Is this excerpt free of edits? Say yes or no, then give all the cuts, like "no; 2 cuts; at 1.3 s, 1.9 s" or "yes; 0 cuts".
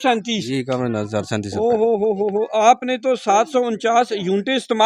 yes; 0 cuts